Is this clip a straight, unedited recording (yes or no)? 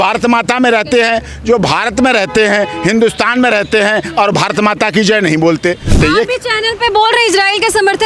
no